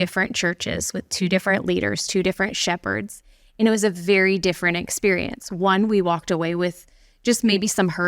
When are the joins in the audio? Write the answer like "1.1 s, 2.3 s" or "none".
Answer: none